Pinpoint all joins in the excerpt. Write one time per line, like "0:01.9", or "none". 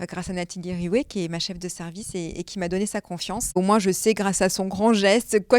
0:03.6